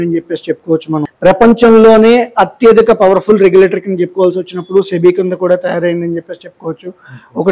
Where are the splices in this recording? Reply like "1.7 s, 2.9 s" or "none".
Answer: 1.0 s